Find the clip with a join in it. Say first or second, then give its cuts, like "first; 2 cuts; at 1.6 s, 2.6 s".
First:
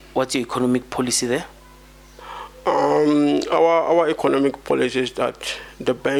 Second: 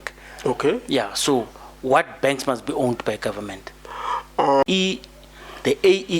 second; 1 cut; at 4.6 s